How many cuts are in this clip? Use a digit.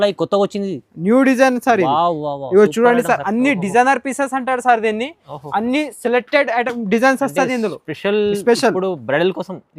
0